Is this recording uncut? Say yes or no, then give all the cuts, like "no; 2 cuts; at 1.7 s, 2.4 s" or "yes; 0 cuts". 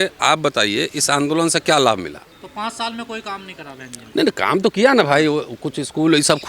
no; 1 cut; at 2.3 s